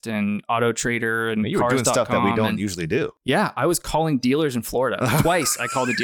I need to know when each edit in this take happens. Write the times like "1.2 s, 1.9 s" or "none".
none